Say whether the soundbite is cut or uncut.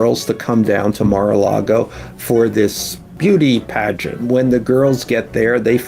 cut